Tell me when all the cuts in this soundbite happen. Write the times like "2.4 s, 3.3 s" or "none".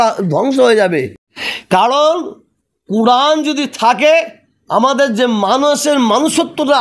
none